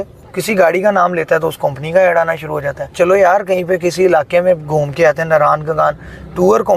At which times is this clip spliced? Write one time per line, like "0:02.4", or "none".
0:02.9